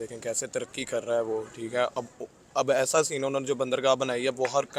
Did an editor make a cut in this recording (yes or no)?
no